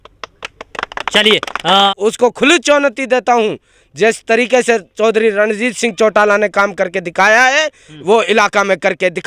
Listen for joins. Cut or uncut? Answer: cut